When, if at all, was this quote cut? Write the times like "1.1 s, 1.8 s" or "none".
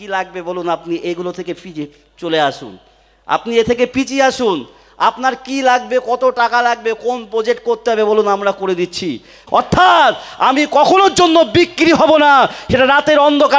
9.4 s